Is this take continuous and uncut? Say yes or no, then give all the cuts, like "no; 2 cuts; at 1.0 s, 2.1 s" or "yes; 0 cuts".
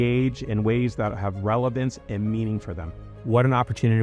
no; 1 cut; at 3.0 s